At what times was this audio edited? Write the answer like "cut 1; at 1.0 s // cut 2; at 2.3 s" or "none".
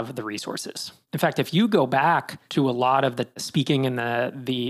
cut 1; at 2.4 s // cut 2; at 3.5 s